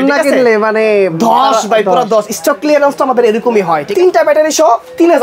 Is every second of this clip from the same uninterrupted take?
no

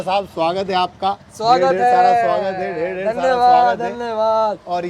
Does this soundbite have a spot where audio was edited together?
yes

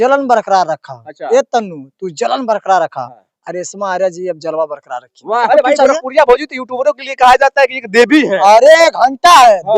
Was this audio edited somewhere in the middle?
yes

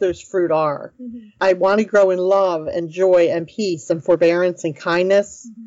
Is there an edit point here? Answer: no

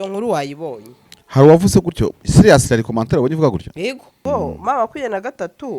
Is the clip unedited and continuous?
no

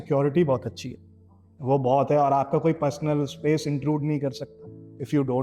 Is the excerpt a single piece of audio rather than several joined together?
yes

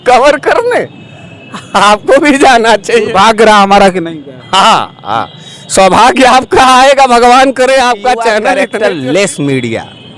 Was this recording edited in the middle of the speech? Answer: yes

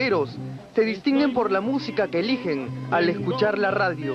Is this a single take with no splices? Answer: no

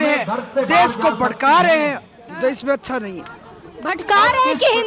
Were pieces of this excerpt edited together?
no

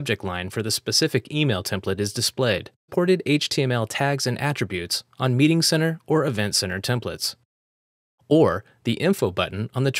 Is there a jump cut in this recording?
no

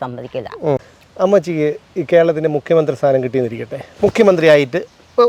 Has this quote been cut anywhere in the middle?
yes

